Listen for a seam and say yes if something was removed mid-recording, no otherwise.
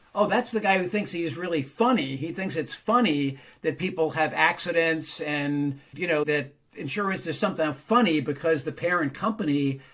no